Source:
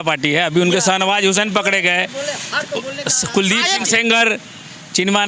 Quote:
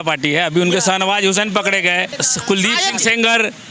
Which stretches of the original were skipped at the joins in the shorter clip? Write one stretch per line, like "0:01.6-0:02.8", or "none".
0:02.1-0:03.0